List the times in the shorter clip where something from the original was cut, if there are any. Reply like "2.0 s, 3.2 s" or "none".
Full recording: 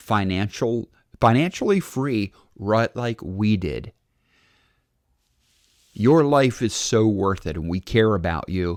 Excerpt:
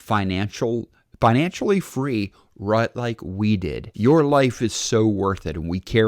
3.9 s